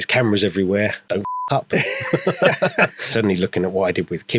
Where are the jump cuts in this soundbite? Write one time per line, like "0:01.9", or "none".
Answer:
0:01.0
0:03.0

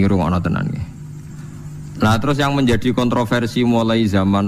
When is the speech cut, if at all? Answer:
none

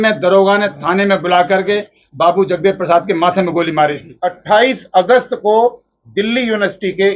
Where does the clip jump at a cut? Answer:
0:04.1

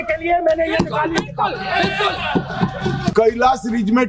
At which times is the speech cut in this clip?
0:03.1

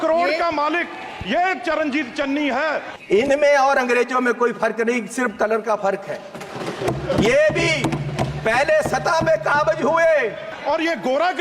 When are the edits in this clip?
0:02.9
0:10.5

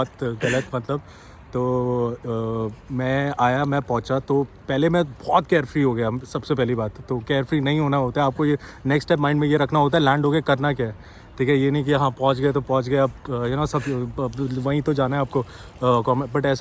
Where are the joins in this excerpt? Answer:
none

